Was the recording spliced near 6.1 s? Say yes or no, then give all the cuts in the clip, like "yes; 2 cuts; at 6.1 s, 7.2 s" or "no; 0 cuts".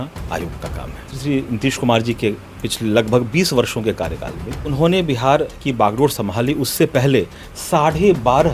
no; 2 cuts; at 1.1 s, 4.7 s